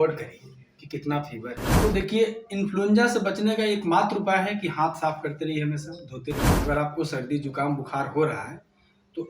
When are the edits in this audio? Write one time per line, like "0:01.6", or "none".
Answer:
0:01.7
0:06.6